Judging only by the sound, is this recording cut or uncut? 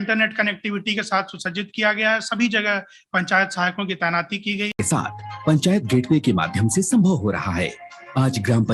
cut